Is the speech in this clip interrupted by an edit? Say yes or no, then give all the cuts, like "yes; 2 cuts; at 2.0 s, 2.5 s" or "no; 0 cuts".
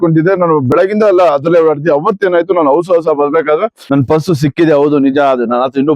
yes; 1 cut; at 3.8 s